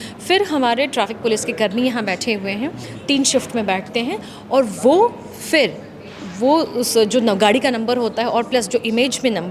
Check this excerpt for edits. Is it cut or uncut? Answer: uncut